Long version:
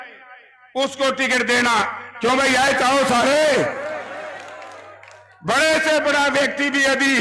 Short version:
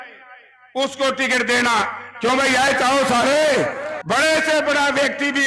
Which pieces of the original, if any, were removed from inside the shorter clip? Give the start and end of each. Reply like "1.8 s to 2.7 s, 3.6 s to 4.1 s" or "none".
3.9 s to 5.3 s